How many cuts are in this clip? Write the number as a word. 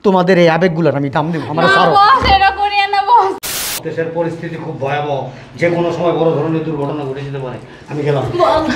one